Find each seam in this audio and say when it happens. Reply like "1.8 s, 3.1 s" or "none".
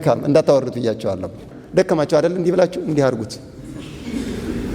1.5 s